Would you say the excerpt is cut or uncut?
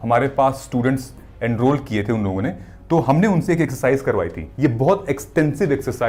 uncut